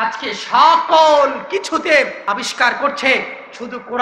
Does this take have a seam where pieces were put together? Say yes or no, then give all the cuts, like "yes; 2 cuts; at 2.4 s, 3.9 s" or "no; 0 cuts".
yes; 1 cut; at 2.2 s